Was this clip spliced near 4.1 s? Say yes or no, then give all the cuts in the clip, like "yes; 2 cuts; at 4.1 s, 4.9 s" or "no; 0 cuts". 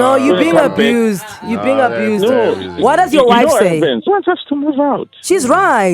yes; 1 cut; at 4.1 s